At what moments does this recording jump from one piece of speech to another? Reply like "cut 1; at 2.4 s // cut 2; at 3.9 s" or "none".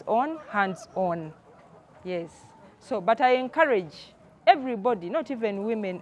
none